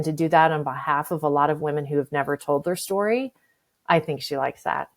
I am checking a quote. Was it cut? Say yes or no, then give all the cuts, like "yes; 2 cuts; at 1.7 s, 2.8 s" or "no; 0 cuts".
no; 0 cuts